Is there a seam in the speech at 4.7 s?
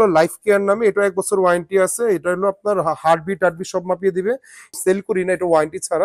yes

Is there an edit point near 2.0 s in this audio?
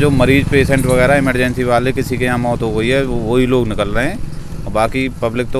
no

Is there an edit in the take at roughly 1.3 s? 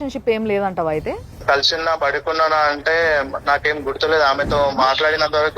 yes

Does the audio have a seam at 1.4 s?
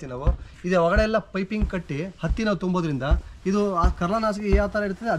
no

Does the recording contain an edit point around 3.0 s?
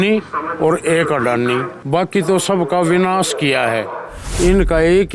no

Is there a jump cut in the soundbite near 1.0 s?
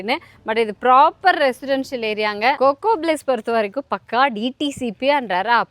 no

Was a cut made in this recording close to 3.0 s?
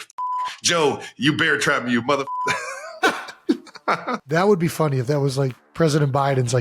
yes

